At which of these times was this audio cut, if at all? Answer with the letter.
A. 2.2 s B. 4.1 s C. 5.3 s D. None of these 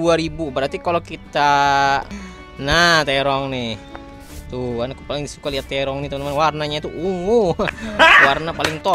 A